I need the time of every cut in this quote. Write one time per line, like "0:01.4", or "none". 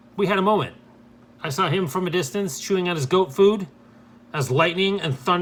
none